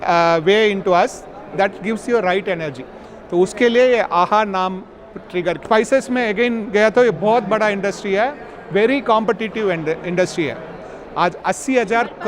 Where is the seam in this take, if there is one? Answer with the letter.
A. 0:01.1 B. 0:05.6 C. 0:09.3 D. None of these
B